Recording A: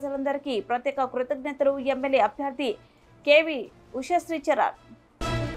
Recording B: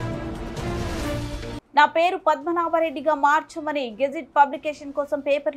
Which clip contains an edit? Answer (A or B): B